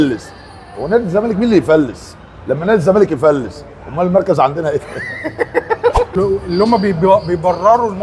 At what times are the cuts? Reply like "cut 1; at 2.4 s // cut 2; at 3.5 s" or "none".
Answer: cut 1; at 6.2 s